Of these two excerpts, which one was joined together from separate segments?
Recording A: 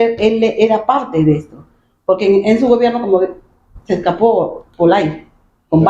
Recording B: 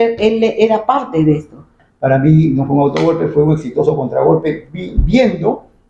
B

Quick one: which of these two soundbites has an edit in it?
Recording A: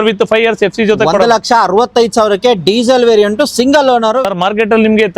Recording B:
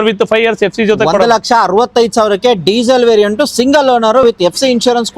A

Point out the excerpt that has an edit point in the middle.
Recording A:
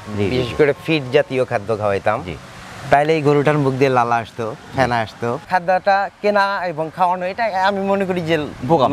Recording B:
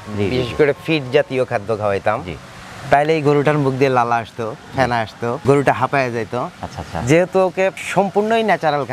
A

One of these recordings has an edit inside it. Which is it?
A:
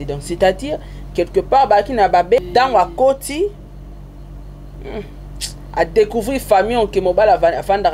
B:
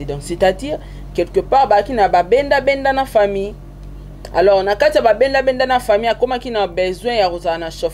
A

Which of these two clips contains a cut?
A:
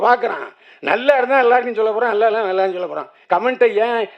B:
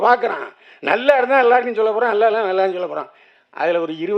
A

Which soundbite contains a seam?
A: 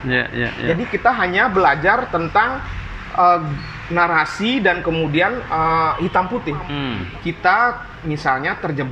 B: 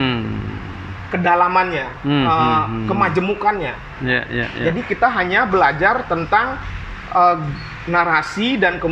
A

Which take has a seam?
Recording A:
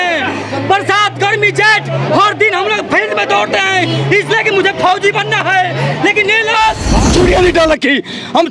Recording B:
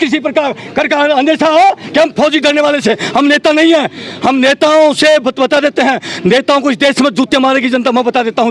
A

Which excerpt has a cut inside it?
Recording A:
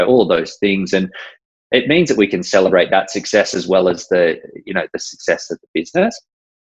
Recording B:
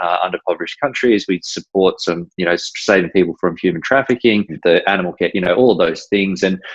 B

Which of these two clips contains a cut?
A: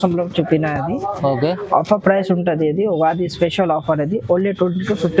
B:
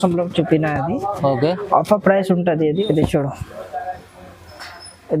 B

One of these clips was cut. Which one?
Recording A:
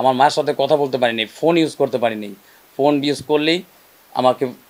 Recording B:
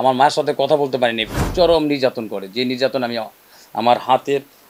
B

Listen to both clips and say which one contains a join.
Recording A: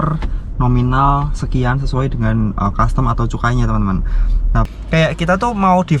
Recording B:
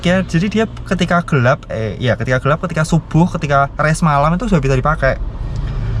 A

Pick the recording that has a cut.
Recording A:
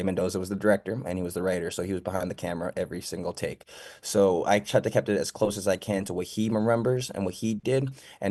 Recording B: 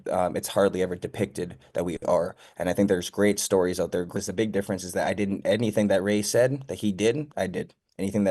B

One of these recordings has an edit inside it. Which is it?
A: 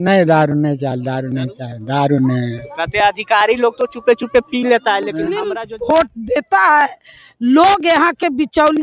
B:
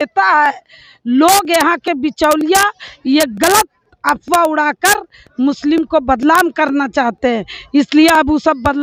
A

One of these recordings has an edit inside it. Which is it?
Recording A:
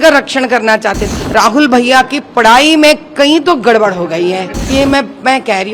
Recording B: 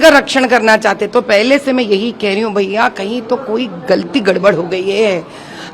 A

